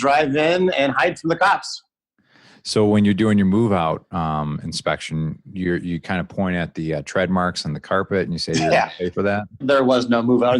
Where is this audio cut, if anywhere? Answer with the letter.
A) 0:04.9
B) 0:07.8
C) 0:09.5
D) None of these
C